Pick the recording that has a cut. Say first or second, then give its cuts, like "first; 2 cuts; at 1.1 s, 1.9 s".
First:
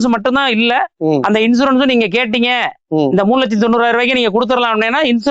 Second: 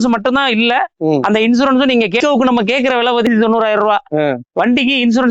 second; 2 cuts; at 2.2 s, 3.3 s